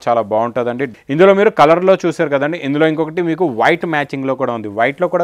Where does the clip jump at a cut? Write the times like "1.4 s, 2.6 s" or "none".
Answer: 0.9 s